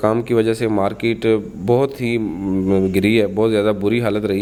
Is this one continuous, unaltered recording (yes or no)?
yes